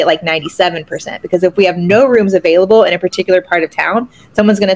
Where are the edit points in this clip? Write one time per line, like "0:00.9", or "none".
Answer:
none